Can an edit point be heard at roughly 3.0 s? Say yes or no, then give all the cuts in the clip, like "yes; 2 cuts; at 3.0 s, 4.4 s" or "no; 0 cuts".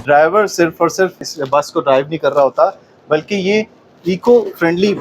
no; 1 cut; at 1.3 s